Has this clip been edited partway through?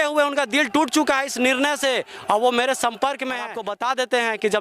yes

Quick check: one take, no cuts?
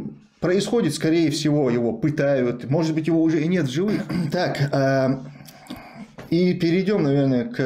no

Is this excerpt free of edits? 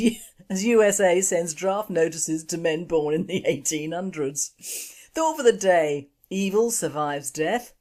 yes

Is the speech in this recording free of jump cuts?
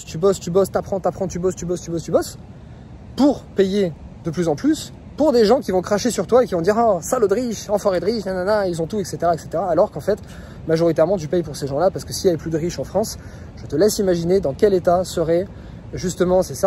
yes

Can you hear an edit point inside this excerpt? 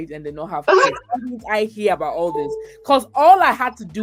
no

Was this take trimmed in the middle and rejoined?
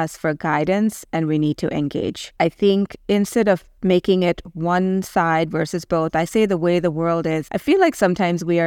yes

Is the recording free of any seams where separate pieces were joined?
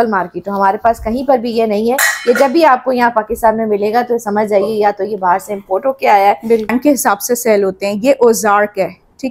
no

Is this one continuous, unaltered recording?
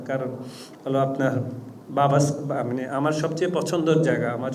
yes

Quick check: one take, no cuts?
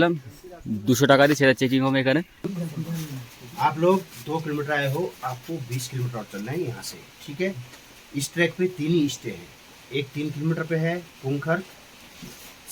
no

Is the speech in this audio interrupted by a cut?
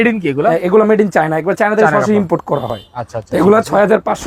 no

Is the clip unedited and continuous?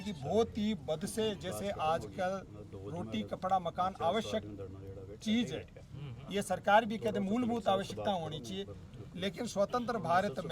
yes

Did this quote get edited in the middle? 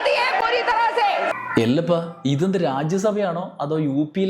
yes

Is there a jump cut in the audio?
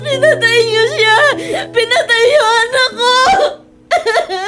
no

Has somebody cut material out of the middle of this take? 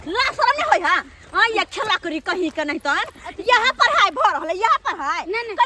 no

